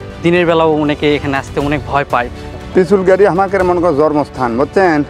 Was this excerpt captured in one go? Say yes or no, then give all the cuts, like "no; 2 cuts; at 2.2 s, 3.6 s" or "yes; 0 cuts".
no; 1 cut; at 2.5 s